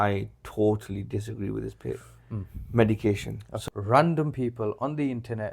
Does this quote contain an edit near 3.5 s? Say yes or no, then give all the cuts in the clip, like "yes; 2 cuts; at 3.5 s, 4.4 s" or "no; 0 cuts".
yes; 1 cut; at 3.5 s